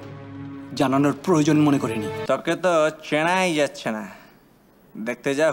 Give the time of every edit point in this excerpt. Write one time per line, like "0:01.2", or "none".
0:02.1